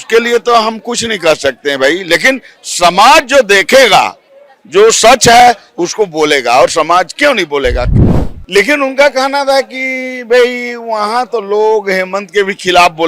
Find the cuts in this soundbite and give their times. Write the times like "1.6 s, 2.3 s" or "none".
8.0 s

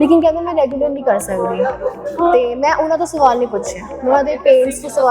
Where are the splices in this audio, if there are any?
none

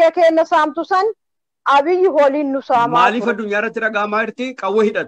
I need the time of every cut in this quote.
3.1 s

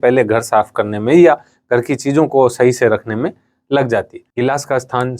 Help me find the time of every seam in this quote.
4.2 s

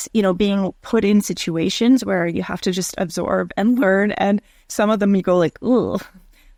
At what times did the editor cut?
none

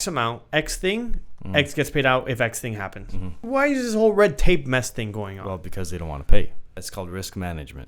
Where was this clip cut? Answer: 3.5 s, 6.8 s

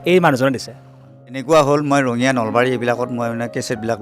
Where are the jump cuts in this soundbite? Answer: 1.4 s

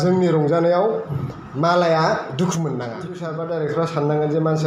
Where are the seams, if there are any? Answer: 3.3 s

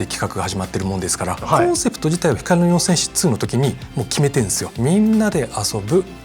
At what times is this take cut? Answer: 1.5 s, 4.6 s

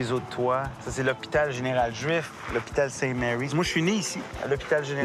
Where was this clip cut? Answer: none

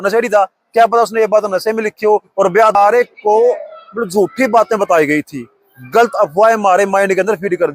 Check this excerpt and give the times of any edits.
2.8 s

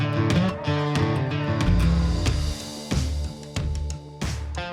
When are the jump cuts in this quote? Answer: none

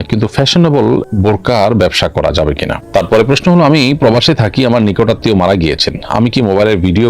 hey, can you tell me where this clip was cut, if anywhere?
2.8 s

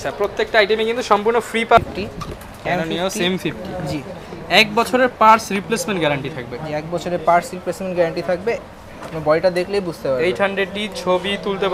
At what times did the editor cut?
1.8 s, 8.6 s

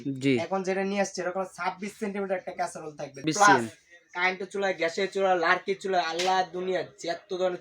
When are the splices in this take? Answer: 3.2 s

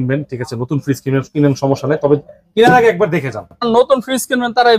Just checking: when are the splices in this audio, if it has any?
3.6 s

